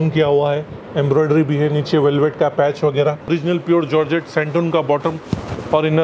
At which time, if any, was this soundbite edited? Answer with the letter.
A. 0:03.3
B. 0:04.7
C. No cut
A